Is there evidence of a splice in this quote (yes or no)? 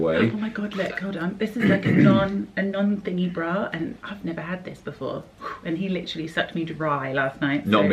no